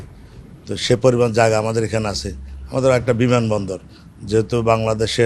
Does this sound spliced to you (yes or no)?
no